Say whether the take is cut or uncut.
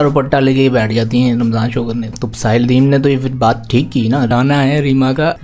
cut